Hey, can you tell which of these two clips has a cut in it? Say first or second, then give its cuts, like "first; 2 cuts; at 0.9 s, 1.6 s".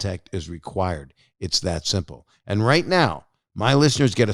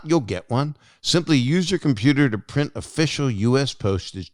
first; 1 cut; at 2.2 s